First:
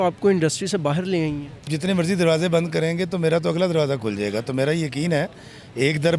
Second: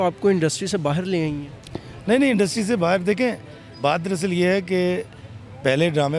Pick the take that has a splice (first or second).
first